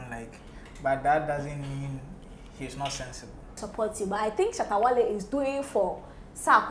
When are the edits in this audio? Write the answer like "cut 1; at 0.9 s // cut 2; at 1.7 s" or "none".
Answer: cut 1; at 3.6 s